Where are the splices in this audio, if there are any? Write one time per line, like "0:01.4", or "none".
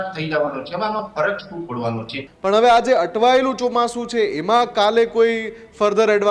0:02.2